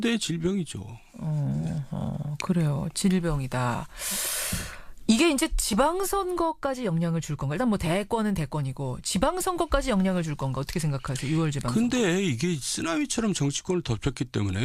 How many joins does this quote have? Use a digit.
1